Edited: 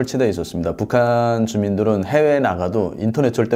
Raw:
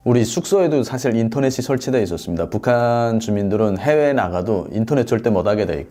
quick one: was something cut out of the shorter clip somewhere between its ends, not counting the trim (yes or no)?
no